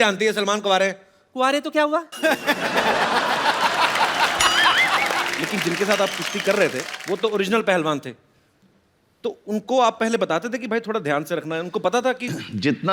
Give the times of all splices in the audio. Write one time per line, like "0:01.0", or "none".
0:05.3
0:06.9